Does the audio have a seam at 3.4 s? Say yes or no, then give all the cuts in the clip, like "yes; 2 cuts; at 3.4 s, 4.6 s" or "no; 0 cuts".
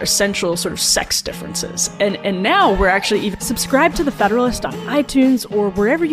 yes; 1 cut; at 3.4 s